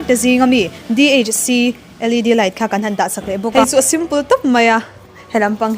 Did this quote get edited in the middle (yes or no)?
yes